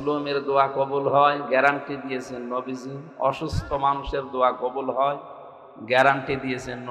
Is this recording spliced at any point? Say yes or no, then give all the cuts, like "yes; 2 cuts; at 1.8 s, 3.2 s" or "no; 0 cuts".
no; 0 cuts